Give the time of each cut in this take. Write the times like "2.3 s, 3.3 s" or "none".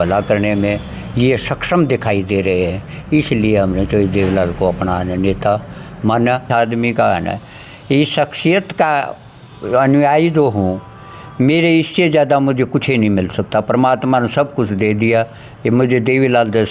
6.4 s